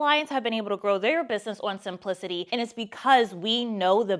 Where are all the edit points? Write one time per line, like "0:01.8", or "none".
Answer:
0:02.5